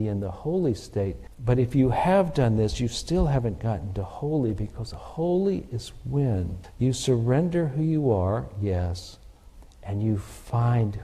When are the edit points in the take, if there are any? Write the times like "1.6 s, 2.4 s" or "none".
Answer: 1.3 s, 6.6 s